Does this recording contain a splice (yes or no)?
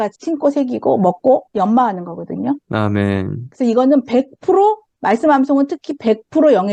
no